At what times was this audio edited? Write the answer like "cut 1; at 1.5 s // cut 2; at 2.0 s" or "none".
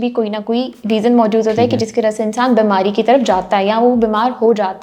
none